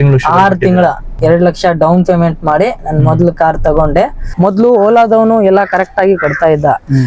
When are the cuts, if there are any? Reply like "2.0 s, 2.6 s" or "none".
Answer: 1.1 s, 4.2 s